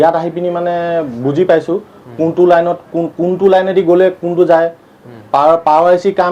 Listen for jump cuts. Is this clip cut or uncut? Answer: uncut